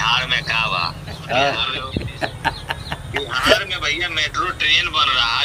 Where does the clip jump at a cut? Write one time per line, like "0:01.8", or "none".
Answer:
0:01.8

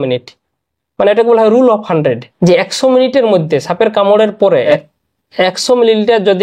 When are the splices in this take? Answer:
0:02.3
0:04.7

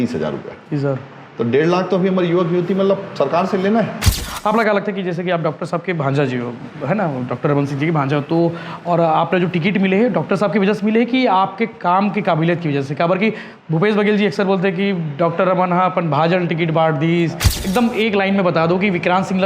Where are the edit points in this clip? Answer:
0:04.0
0:17.5

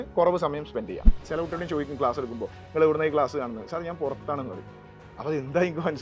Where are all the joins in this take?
0:01.3

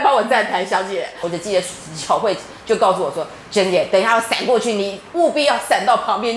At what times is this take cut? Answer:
0:01.2

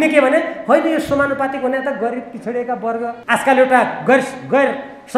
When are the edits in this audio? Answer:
0:03.2

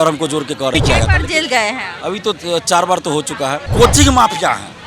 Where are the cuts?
0:00.7
0:03.6

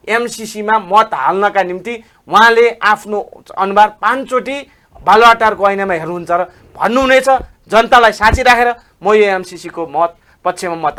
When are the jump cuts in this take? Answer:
none

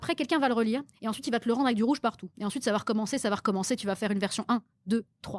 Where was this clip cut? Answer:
none

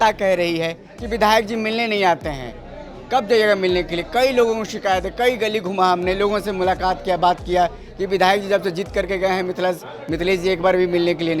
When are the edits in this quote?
none

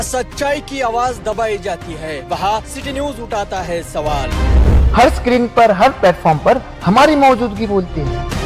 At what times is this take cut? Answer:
none

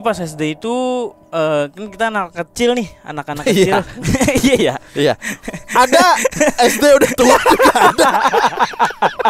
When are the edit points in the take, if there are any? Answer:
none

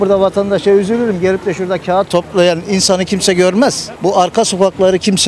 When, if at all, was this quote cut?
0:02.1

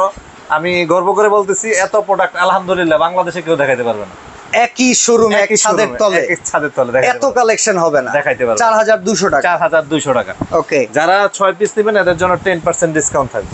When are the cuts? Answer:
none

